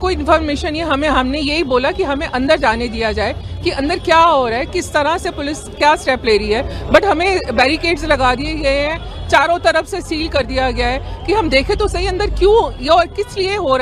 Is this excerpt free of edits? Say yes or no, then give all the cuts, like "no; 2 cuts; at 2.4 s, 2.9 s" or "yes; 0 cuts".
yes; 0 cuts